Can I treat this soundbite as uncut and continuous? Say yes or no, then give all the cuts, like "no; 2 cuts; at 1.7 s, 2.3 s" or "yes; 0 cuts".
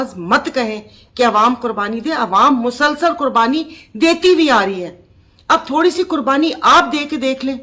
yes; 0 cuts